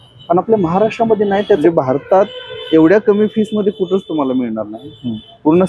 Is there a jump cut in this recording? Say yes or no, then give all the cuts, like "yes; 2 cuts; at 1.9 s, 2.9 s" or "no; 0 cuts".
yes; 1 cut; at 1.6 s